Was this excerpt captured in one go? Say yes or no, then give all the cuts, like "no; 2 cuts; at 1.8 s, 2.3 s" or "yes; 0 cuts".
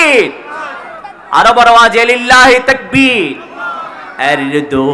yes; 0 cuts